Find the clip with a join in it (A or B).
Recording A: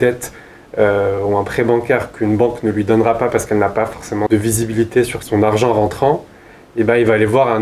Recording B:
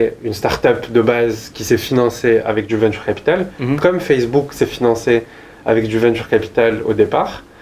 A